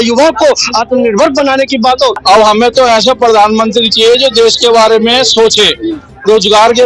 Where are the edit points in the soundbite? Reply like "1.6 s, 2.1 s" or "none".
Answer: 2.2 s